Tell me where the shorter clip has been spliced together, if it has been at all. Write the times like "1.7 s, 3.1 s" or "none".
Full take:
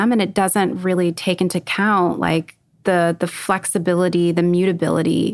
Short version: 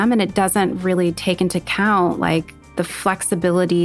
2.7 s

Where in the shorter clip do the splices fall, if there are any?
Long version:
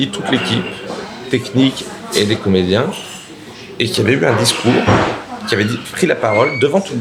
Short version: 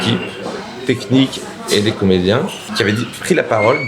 2.6 s

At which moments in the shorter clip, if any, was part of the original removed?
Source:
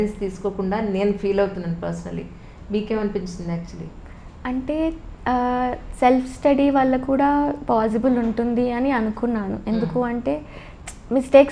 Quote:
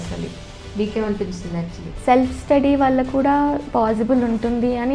1.9 s

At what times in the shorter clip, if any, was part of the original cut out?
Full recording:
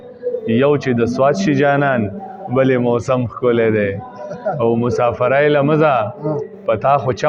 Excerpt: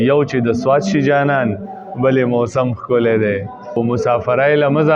3.8 s

